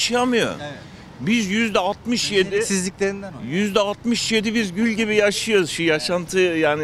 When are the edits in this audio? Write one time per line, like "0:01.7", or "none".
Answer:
none